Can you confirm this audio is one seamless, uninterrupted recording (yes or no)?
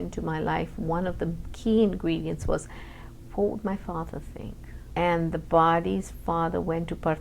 no